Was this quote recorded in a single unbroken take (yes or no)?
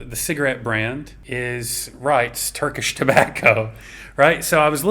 no